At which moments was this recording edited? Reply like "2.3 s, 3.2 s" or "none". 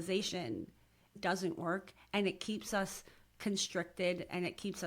1.2 s